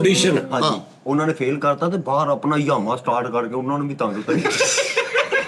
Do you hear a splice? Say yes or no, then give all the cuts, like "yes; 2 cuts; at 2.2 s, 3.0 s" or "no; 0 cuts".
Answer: no; 0 cuts